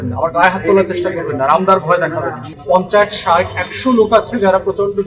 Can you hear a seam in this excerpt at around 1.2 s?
no; 1 cut; at 2.5 s

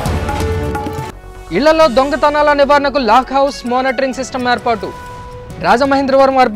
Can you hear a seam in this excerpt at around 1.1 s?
yes; 1 cut; at 1.1 s

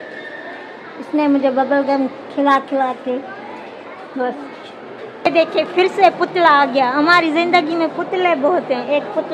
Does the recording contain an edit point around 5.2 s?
yes; 1 cut; at 5.2 s

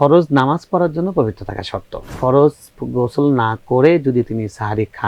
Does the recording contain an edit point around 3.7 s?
no; 1 cut; at 2.2 s

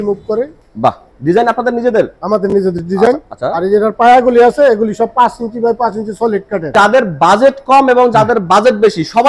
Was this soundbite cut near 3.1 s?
no; 2 cuts; at 1.1 s, 6.7 s

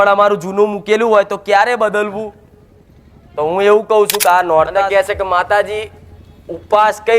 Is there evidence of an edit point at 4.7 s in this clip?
yes; 1 cut; at 4.7 s

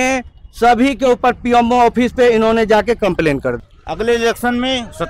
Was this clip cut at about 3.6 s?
yes; 1 cut; at 3.6 s

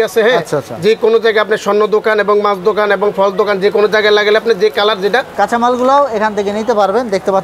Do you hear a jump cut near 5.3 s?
yes; 1 cut; at 5.3 s

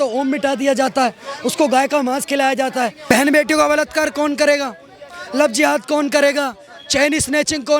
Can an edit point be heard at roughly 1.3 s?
no; 1 cut; at 3.0 s

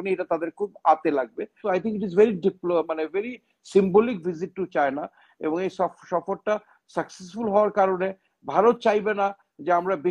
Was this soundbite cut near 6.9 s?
no; 1 cut; at 1.6 s

